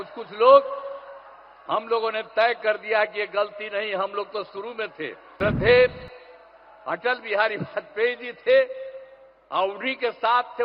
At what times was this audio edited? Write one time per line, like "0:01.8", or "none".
0:05.2